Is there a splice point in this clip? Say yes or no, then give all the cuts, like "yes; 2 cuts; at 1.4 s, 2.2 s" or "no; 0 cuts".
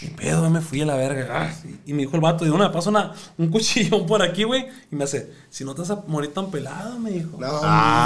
no; 0 cuts